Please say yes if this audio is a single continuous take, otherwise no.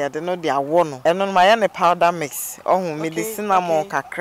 no